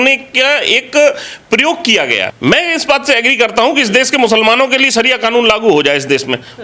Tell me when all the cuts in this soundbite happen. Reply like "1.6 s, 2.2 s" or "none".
2.3 s